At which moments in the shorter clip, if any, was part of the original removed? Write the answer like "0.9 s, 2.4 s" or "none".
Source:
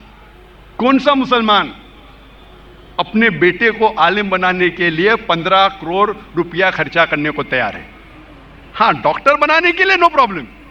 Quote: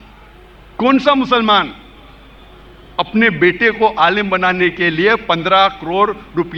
none